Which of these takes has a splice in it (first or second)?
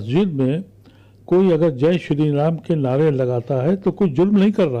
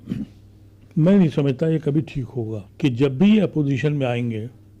second